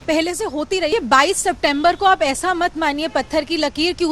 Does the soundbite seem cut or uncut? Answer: cut